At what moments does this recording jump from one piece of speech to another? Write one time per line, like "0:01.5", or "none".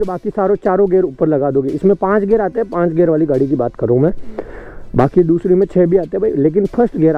none